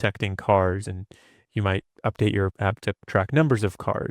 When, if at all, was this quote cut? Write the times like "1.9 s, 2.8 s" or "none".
1.9 s, 2.8 s